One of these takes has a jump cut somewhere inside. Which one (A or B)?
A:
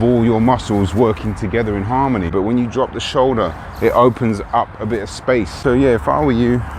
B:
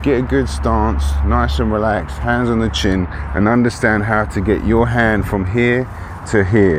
A